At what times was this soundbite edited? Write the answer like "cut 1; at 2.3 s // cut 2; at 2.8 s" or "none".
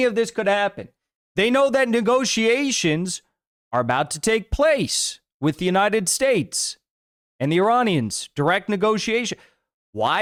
none